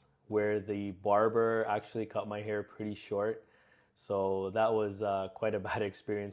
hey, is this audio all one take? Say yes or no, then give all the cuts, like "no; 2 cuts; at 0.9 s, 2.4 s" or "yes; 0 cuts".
yes; 0 cuts